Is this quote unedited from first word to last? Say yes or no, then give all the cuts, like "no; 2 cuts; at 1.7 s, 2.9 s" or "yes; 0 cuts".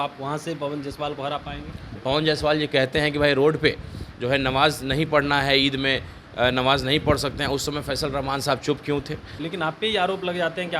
no; 2 cuts; at 2.0 s, 9.4 s